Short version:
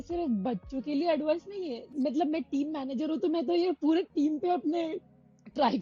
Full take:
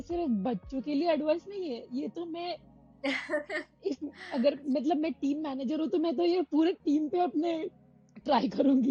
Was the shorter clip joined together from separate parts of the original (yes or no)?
yes